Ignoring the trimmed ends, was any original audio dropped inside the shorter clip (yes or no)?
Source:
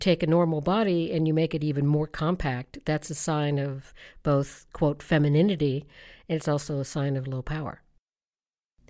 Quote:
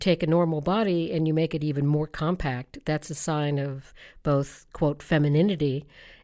no